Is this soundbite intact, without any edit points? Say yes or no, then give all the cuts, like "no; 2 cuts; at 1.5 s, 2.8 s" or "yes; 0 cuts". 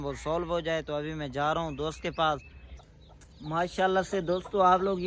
no; 1 cut; at 2.8 s